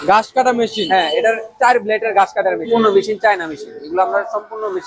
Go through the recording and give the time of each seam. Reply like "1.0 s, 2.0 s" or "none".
2.7 s